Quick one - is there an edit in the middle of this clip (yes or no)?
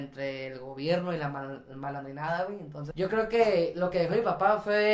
yes